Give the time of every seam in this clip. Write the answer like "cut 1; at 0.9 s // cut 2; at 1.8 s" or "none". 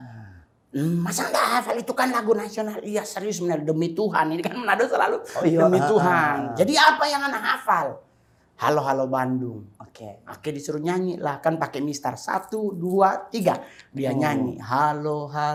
none